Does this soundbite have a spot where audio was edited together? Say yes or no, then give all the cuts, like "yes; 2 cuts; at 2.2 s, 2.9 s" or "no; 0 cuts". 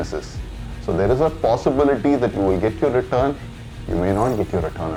no; 0 cuts